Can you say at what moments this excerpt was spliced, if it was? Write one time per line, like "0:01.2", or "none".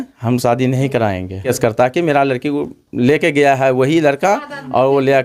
0:01.5